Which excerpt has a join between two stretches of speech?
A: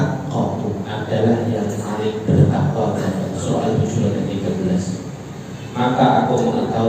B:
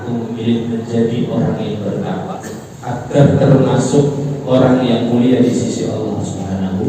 B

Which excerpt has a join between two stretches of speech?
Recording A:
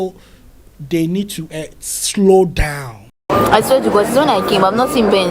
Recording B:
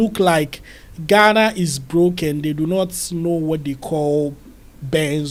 A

